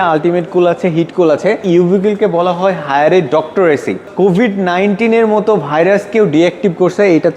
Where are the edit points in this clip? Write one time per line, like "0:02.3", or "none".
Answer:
0:01.6
0:04.1